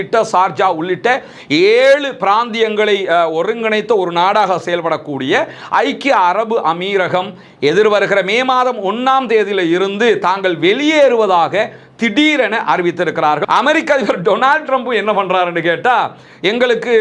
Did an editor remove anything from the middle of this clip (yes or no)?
yes